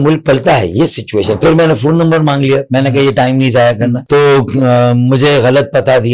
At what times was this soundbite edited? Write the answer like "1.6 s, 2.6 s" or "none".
1.4 s, 4.0 s

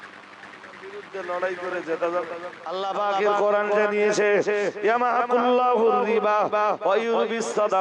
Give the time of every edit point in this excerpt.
2.6 s

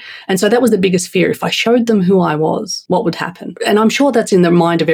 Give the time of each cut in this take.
2.8 s, 3.5 s

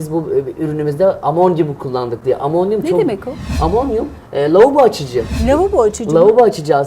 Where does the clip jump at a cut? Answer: 5.3 s

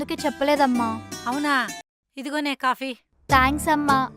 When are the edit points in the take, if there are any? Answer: 1.8 s

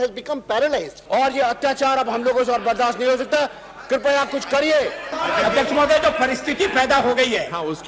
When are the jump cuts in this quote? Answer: 1.0 s, 5.2 s

